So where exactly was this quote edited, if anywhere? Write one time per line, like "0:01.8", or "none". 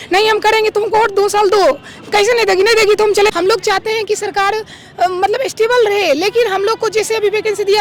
0:03.3